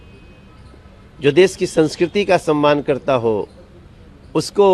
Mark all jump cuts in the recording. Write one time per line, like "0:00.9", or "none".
none